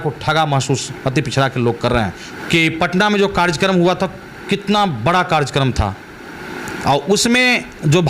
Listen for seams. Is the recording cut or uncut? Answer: cut